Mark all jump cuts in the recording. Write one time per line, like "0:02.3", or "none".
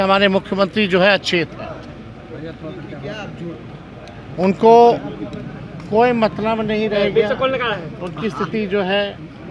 none